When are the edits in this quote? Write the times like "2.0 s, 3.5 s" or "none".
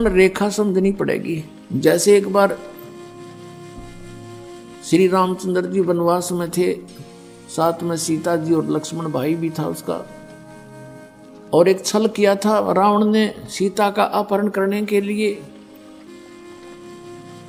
none